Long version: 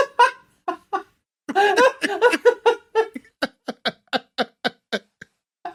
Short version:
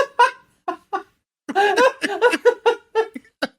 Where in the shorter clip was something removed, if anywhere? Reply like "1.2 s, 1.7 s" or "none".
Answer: none